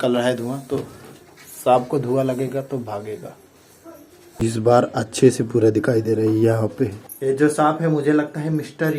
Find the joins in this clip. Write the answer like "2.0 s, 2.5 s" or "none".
4.4 s, 7.1 s